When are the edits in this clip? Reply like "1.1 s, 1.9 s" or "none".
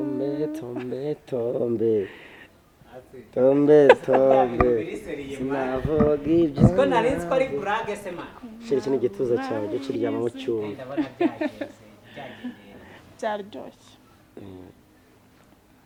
none